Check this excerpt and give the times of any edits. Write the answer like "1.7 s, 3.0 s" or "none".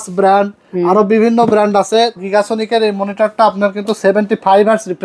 2.2 s